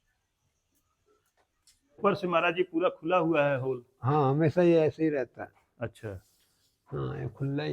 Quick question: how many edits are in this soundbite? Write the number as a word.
one